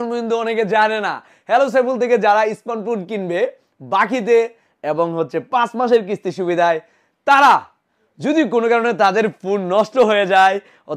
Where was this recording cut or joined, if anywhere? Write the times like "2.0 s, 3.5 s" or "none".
none